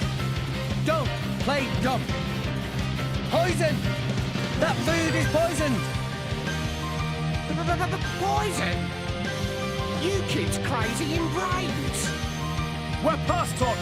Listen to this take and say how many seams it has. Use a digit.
0